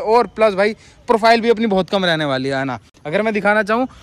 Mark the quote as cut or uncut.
uncut